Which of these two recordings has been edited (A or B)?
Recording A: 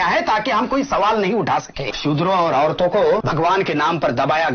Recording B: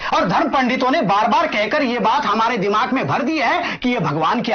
A